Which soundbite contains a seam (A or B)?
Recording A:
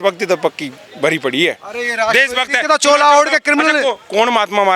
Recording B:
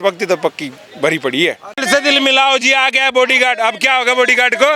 B